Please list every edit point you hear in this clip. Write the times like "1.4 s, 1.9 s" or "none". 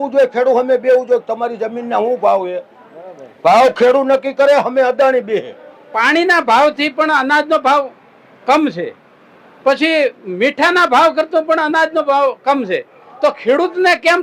5.9 s